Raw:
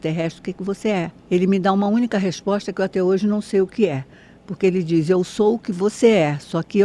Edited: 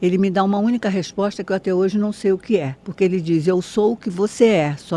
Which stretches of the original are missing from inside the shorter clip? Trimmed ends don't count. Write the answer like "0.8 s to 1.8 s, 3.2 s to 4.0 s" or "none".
4.1 s to 4.4 s